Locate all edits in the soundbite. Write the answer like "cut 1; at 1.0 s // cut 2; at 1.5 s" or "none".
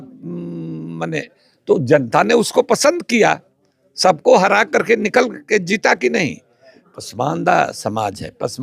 cut 1; at 6.8 s